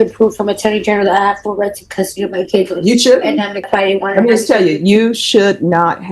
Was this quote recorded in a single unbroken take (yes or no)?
no